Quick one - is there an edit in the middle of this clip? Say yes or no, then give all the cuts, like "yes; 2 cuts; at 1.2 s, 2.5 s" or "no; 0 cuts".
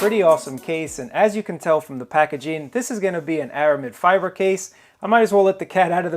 no; 0 cuts